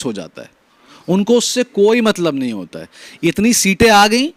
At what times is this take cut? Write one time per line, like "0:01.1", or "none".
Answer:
none